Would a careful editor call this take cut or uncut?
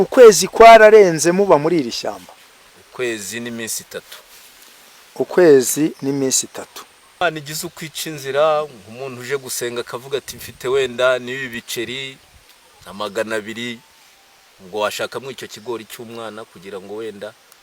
cut